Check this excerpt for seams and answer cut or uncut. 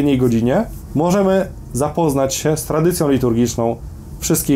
uncut